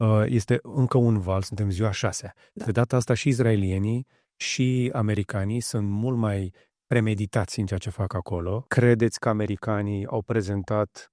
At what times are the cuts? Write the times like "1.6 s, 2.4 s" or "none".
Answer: 8.6 s

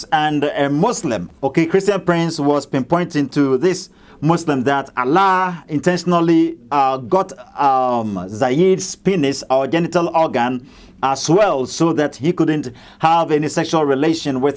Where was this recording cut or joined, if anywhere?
1.3 s

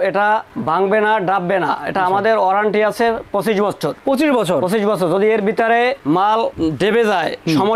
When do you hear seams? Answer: none

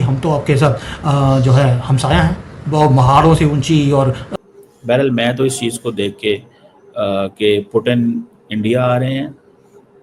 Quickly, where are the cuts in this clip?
4.3 s

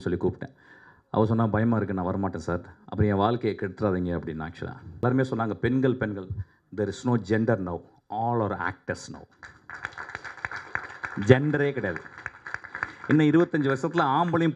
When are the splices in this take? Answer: 5.0 s

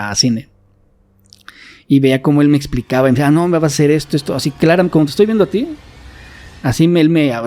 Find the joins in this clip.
none

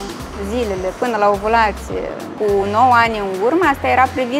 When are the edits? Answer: 2.3 s

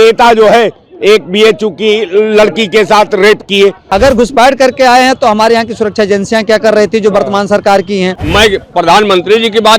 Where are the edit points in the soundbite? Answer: 3.8 s, 8.2 s

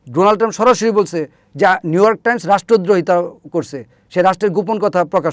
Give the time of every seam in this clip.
none

